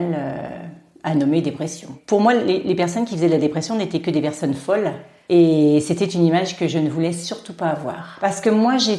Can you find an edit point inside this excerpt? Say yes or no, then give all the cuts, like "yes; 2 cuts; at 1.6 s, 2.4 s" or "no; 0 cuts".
yes; 2 cuts; at 1.9 s, 8.1 s